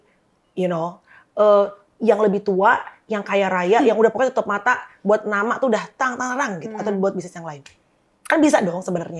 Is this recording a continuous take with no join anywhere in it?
yes; 0 cuts

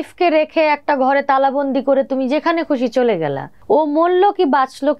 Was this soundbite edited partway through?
yes; 1 cut; at 3.5 s

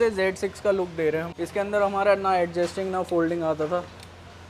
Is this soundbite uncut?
no; 1 cut; at 1.3 s

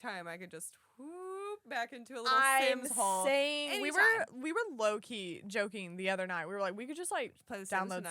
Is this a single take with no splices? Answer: yes; 0 cuts

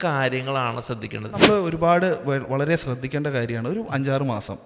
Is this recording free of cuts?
no; 1 cut; at 1.4 s

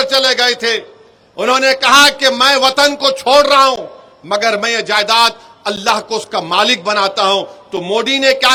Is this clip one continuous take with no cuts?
yes; 0 cuts

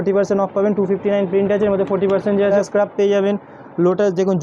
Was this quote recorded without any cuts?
no; 1 cut; at 2.5 s

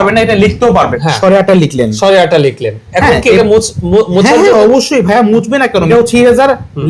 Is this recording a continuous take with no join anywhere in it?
no; 2 cuts; at 1.0 s, 5.9 s

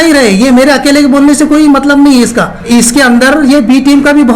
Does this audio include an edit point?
yes; 1 cut; at 2.7 s

